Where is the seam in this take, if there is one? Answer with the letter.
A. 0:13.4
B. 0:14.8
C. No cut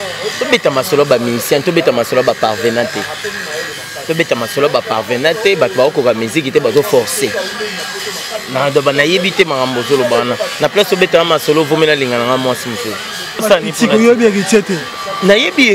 A